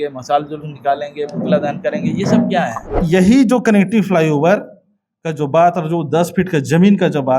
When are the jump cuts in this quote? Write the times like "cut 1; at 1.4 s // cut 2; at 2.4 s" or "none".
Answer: cut 1; at 2.9 s